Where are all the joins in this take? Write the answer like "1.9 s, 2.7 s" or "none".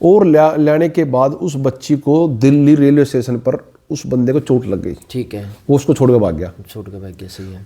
none